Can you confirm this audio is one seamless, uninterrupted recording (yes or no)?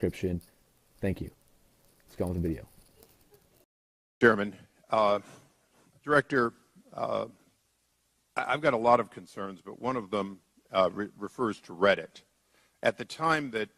no